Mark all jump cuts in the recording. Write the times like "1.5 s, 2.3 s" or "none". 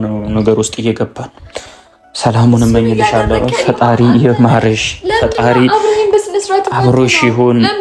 none